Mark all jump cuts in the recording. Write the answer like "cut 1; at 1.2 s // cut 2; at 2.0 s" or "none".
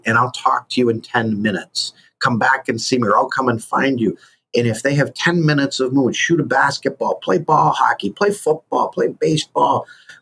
cut 1; at 3.3 s